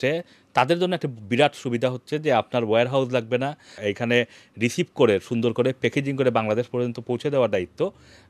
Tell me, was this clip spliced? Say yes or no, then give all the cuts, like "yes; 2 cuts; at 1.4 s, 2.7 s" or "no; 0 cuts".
no; 0 cuts